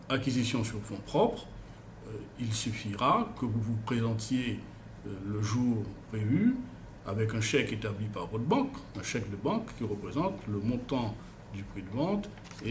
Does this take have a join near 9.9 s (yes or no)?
no